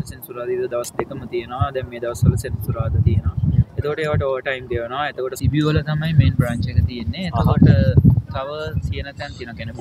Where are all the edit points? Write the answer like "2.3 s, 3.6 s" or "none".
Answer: 5.4 s